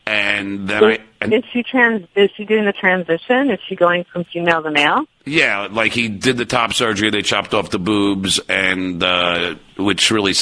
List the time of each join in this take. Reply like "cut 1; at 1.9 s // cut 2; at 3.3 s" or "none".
none